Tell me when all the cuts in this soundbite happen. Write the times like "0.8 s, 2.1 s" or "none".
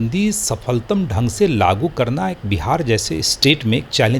none